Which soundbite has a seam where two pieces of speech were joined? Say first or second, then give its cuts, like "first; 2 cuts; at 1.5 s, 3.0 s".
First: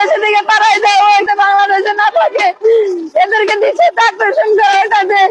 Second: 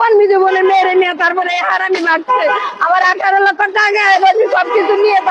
first; 1 cut; at 1.3 s